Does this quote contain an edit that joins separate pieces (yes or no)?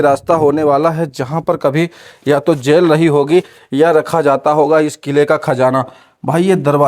no